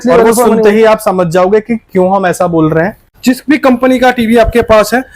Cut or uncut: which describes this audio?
cut